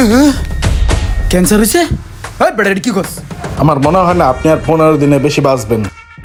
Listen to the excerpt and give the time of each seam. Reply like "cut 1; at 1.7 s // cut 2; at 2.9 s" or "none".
none